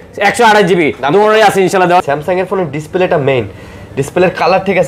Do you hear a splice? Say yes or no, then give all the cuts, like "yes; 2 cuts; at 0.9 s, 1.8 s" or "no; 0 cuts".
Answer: yes; 1 cut; at 2.0 s